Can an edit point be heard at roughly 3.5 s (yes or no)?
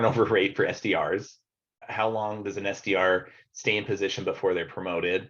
no